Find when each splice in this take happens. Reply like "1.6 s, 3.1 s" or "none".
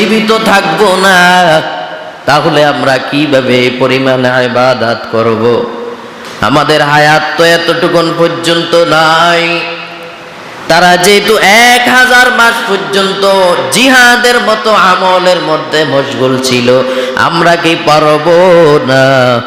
none